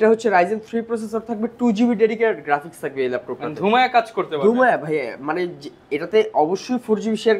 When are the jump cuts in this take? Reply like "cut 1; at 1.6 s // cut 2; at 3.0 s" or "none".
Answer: none